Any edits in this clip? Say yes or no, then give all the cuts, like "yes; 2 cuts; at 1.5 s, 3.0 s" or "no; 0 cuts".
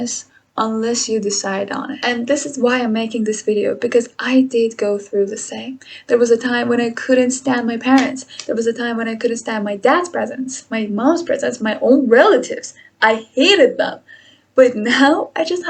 yes; 1 cut; at 1.9 s